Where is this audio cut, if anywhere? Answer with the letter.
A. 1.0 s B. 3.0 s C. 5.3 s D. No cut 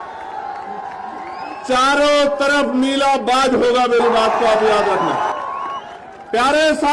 C